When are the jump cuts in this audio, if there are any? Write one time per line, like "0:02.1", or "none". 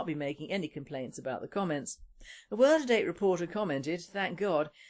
0:01.8